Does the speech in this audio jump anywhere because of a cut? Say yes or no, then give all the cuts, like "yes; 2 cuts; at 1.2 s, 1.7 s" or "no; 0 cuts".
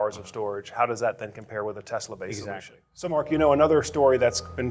yes; 1 cut; at 2.9 s